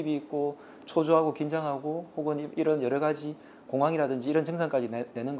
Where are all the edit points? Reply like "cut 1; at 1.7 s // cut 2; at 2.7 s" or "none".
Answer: none